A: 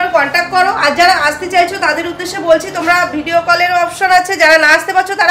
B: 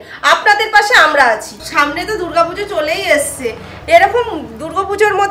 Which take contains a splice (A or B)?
B